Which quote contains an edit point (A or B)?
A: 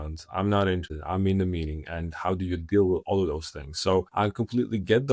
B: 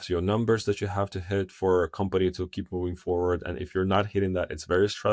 A